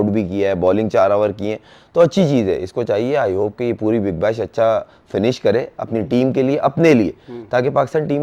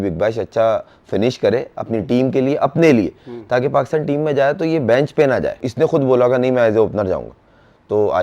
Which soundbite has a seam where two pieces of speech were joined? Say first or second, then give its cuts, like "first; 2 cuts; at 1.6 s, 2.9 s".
second; 1 cut; at 5.7 s